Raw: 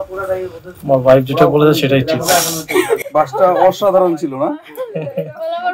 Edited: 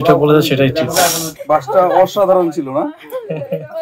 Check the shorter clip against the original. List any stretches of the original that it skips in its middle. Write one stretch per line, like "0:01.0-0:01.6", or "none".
0:02.7-0:03.0